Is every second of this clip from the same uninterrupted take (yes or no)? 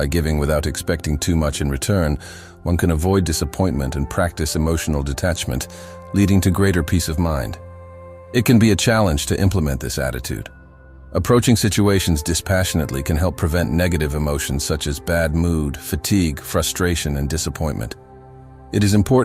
no